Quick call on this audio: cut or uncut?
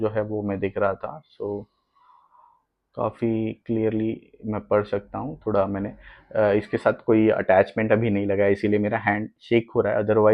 uncut